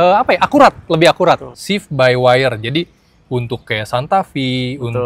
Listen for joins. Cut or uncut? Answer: cut